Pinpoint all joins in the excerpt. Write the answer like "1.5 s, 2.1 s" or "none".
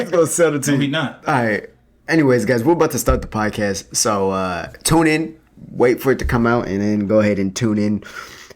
none